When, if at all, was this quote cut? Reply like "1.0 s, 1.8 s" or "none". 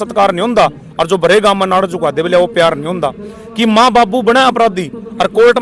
none